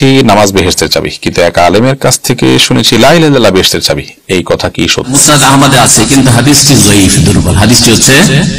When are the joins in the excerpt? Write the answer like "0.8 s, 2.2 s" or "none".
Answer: 5.1 s